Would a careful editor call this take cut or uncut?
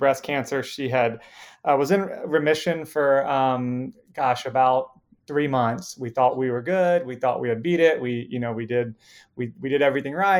uncut